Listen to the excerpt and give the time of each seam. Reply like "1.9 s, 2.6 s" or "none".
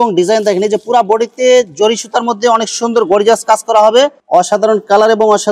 4.2 s

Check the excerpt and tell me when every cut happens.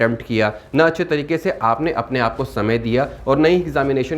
none

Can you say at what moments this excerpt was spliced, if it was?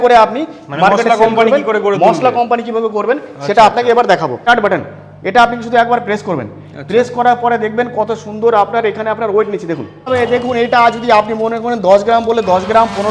4.4 s, 10.1 s

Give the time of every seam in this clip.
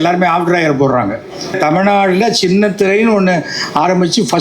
1.6 s

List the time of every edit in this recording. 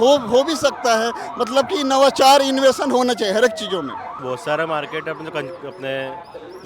4.2 s

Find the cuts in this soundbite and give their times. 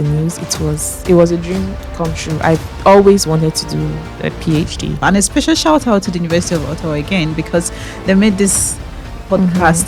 5.0 s

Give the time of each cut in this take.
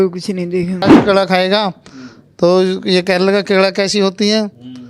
0.9 s

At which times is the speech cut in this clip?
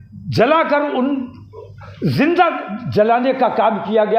none

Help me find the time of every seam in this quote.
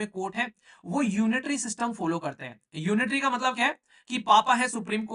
none

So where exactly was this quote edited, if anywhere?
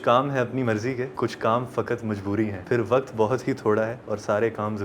1.1 s, 2.6 s

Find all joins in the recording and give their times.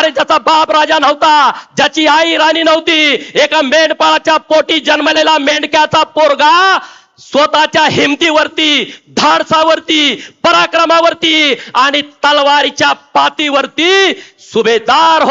none

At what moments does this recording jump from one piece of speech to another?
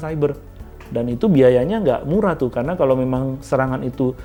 none

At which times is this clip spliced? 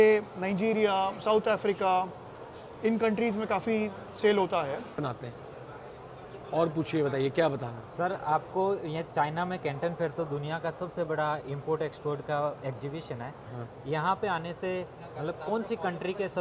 5.0 s

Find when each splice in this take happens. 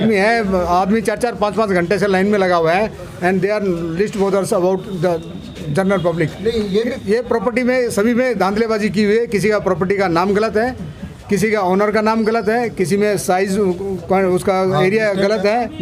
none

